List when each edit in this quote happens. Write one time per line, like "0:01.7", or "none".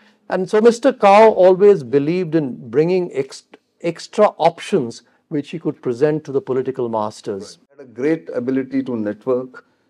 0:07.9